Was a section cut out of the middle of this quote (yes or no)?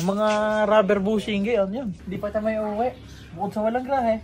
yes